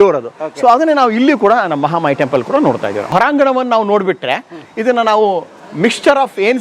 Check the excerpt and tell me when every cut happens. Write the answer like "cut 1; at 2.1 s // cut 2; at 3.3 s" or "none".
cut 1; at 3.0 s